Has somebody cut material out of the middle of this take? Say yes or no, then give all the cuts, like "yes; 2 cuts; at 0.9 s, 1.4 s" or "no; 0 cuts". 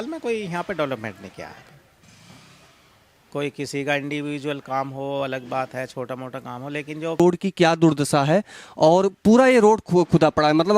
yes; 1 cut; at 7.2 s